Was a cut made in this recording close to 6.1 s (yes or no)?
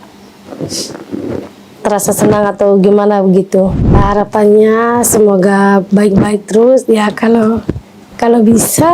no